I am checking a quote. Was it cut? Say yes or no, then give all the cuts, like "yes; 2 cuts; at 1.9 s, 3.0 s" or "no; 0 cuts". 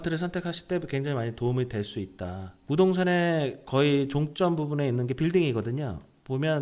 yes; 1 cut; at 2.6 s